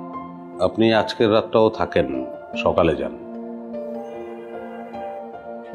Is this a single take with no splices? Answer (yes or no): yes